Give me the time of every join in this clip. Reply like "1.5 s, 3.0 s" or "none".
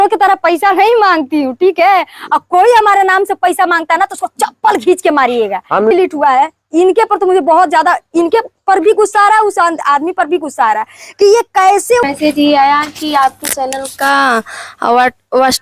5.9 s, 12.0 s

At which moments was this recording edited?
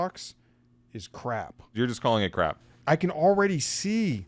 1.6 s, 2.7 s

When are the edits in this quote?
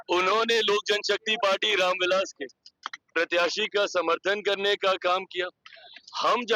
none

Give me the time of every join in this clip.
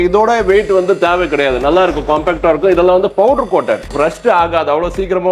none

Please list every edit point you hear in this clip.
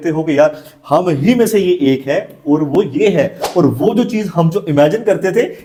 none

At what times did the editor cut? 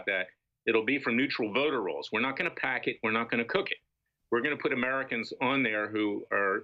none

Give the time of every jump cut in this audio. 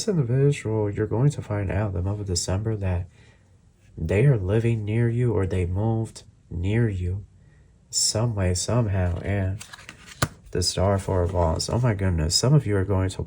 10.4 s

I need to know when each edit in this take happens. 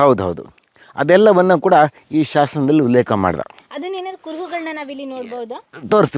none

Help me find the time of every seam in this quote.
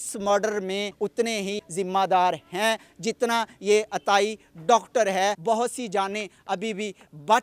1.3 s, 5.4 s

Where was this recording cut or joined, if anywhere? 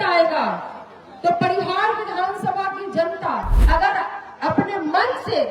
3.5 s

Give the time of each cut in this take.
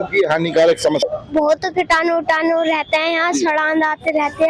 1.0 s

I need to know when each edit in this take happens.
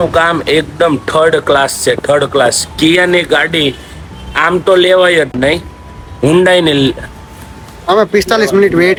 none

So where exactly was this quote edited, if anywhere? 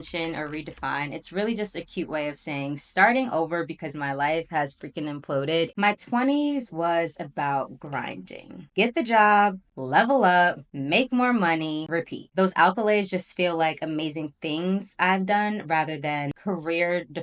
5.7 s, 12.3 s

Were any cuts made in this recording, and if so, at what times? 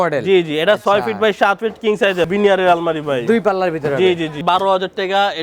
2.3 s, 4.4 s

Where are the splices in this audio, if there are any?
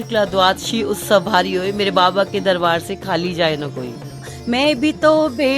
4.3 s

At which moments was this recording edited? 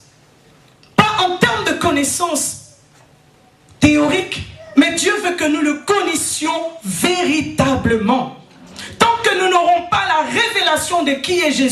none

